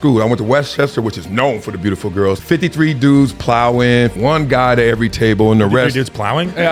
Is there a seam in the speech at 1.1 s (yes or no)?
no